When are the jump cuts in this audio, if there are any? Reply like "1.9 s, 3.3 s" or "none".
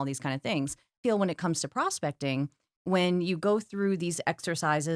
1.0 s